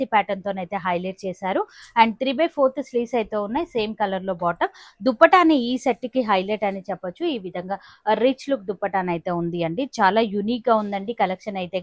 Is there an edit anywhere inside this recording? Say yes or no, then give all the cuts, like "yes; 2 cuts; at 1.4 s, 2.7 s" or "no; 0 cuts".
no; 0 cuts